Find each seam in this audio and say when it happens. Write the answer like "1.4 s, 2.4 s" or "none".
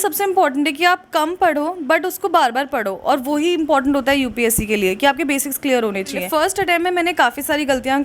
6.3 s